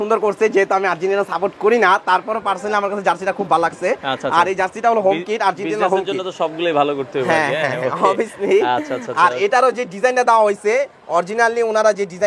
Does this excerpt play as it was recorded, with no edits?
yes; 0 cuts

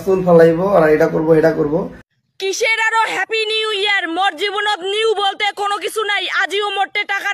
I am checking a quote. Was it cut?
yes; 1 cut; at 2.3 s

